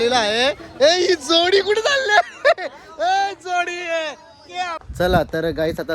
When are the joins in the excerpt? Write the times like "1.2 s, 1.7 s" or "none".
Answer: 4.8 s